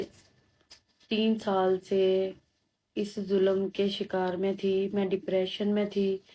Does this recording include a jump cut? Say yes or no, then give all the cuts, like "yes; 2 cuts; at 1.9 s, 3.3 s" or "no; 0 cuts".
no; 0 cuts